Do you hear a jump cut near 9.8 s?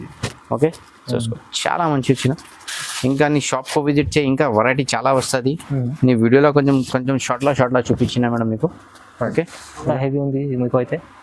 yes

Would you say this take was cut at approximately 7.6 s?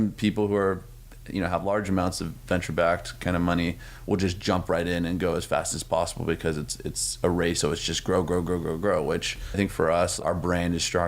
yes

